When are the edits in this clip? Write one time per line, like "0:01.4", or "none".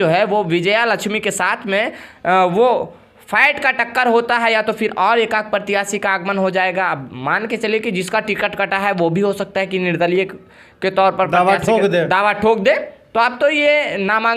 none